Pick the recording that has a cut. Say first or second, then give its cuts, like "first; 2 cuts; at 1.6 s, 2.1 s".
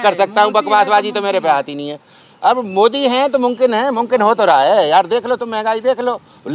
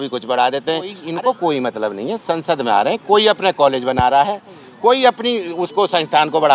second; 1 cut; at 1.0 s